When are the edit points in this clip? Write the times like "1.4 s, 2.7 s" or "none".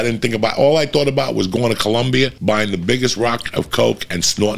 2.4 s